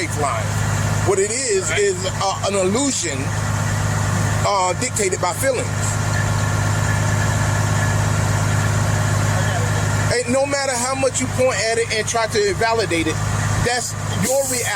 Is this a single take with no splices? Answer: yes; 0 cuts

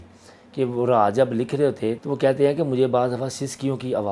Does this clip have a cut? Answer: yes; 1 cut; at 2.0 s

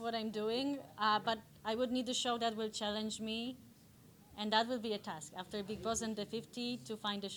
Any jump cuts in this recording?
no; 0 cuts

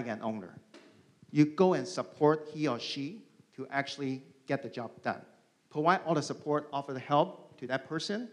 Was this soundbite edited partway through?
no; 0 cuts

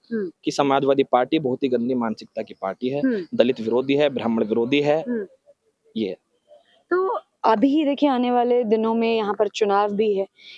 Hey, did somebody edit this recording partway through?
no; 0 cuts

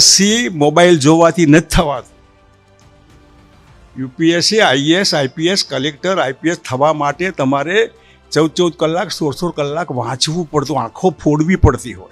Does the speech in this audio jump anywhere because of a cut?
no; 0 cuts

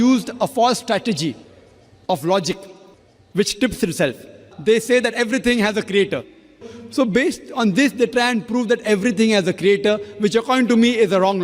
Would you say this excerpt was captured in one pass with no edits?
no; 2 cuts; at 4.5 s, 6.7 s

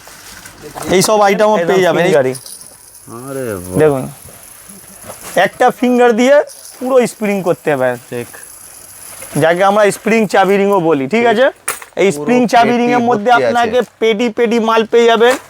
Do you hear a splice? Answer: yes; 1 cut; at 2.0 s

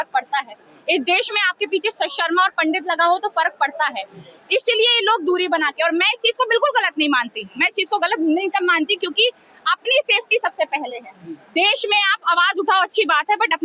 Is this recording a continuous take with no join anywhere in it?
yes; 0 cuts

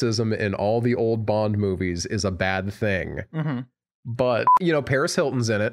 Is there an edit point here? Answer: yes; 1 cut; at 4.5 s

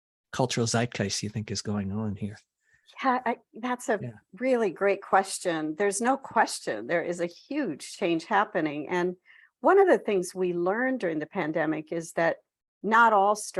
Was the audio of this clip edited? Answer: no; 0 cuts

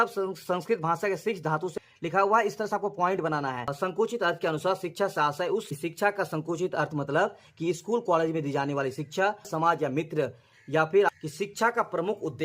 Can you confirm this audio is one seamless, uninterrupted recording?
no; 5 cuts; at 1.7 s, 3.7 s, 5.7 s, 9.5 s, 11.2 s

